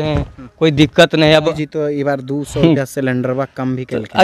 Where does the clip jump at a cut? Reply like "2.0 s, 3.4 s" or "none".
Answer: 1.5 s